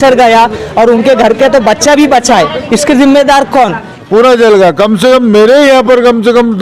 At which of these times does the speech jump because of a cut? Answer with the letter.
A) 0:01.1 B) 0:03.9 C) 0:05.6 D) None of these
B